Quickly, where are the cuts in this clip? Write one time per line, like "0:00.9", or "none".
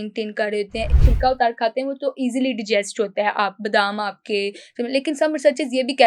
0:01.0